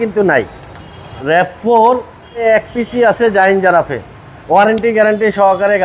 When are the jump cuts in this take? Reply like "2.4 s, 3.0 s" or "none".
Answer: 1.1 s, 2.4 s